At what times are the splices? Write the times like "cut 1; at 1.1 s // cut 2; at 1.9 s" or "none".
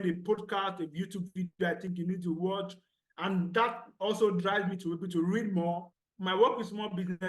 cut 1; at 5.9 s